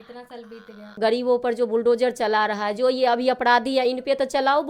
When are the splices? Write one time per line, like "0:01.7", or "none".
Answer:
0:01.0